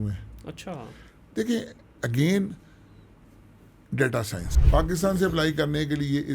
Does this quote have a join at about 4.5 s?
yes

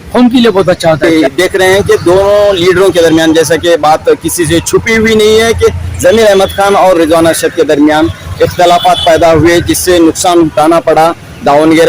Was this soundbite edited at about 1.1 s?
yes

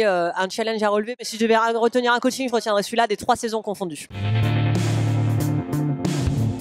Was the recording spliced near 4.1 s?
yes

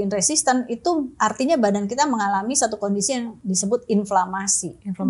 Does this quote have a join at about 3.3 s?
yes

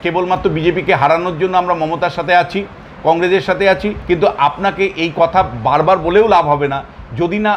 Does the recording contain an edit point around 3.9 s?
yes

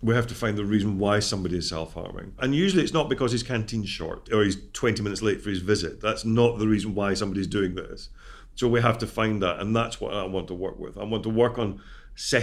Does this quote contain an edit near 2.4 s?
yes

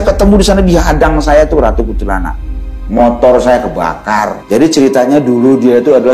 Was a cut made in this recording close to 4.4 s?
yes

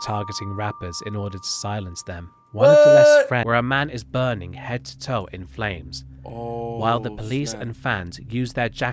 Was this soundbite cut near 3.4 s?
yes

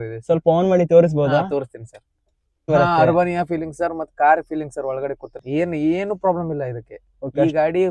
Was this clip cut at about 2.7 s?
yes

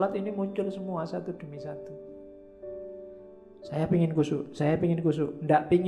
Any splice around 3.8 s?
yes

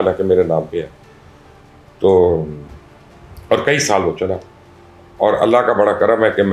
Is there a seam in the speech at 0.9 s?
no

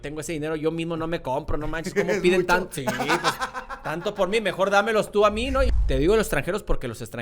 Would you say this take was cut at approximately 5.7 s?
yes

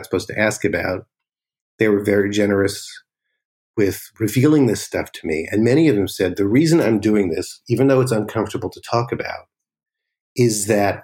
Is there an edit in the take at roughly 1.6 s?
no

